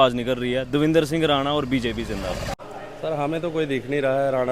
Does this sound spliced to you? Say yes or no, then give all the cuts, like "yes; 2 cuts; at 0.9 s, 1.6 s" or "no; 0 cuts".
yes; 1 cut; at 2.6 s